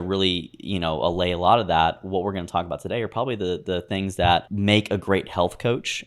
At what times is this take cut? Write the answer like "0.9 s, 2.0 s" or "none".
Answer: 4.5 s